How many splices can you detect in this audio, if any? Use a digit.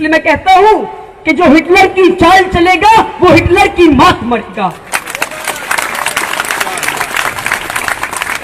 0